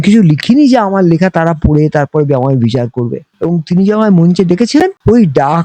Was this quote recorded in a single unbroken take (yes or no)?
no